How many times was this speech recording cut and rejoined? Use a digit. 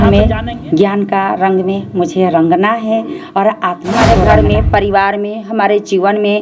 1